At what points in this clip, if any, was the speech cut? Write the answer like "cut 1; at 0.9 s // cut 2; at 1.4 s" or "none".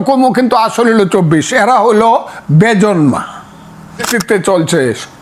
cut 1; at 4.1 s